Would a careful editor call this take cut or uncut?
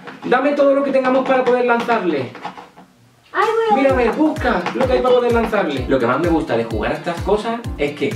cut